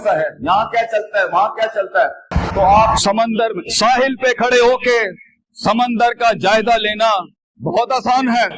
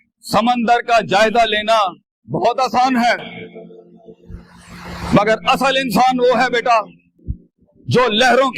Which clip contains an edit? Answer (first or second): first